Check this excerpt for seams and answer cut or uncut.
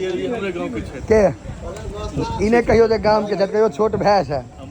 uncut